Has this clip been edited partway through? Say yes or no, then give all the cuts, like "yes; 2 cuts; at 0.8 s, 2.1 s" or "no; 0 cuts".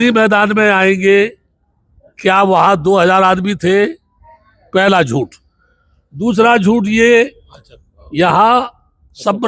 no; 0 cuts